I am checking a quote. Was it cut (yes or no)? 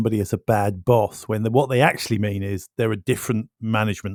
no